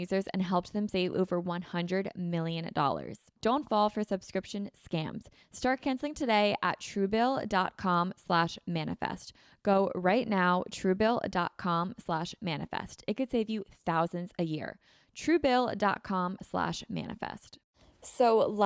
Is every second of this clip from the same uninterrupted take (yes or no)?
no